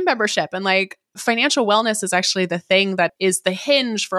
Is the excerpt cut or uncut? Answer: cut